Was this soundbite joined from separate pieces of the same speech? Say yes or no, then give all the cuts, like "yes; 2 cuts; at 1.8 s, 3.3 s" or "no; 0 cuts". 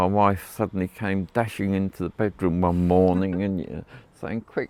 no; 0 cuts